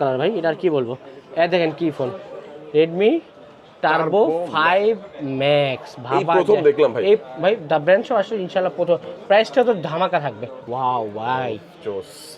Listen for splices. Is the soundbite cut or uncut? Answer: cut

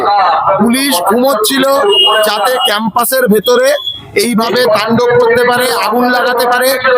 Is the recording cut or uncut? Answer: uncut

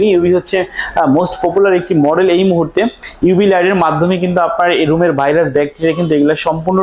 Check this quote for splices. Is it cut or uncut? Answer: uncut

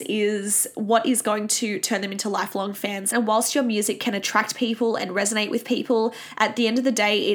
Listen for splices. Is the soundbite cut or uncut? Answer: cut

